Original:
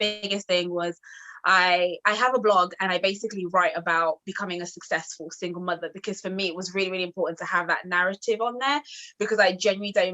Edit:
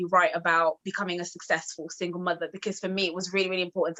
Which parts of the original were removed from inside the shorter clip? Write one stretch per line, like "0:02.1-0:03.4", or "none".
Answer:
none